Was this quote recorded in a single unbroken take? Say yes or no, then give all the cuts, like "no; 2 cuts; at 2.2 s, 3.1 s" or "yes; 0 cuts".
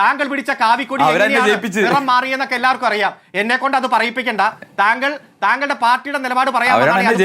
no; 1 cut; at 4.6 s